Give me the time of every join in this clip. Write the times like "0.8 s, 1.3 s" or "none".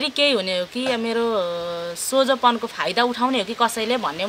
none